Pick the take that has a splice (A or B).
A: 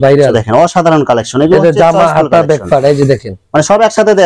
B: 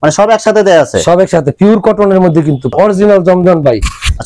B